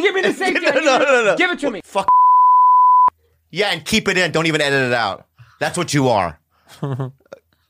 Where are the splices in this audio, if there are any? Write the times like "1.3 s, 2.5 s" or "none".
1.8 s